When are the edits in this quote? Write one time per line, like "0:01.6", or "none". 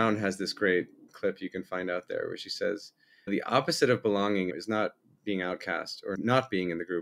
0:01.1
0:03.3
0:04.5
0:06.1